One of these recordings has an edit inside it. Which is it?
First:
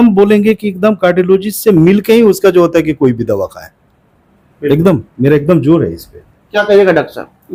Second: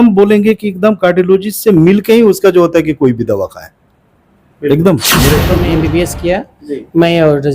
second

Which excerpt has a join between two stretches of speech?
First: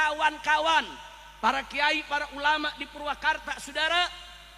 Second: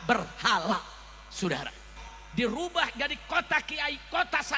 second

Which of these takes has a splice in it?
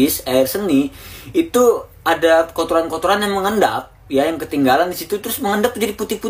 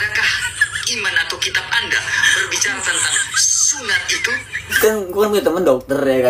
second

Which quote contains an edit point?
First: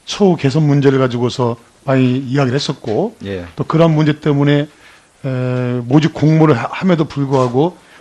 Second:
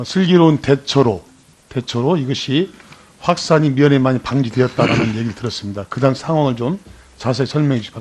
first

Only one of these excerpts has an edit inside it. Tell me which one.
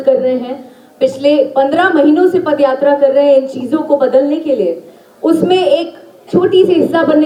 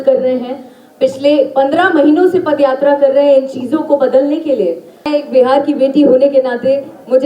second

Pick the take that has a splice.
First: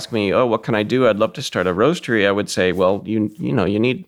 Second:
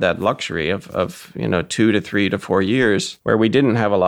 second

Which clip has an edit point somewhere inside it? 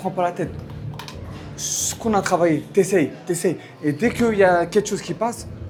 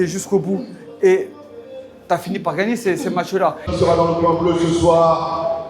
second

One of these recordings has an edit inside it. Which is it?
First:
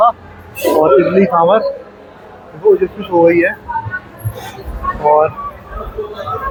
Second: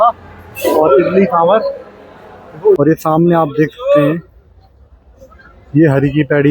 second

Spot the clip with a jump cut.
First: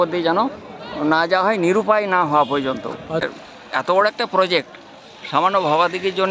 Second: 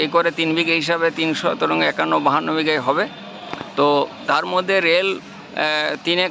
first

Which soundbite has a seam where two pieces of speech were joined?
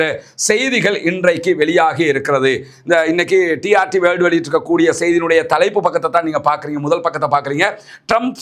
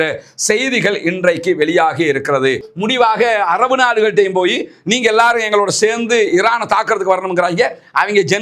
second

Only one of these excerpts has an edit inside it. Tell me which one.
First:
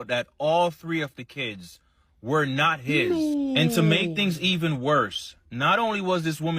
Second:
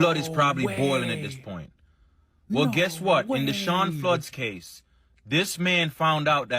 first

